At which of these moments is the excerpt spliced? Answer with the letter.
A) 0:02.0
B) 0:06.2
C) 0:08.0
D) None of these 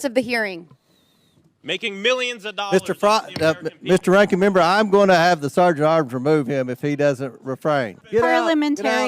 C